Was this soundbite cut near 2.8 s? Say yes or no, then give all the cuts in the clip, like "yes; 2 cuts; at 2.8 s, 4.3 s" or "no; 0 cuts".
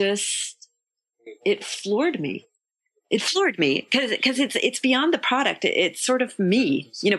yes; 1 cut; at 2.8 s